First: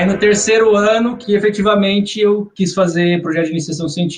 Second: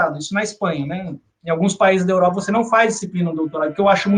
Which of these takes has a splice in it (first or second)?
first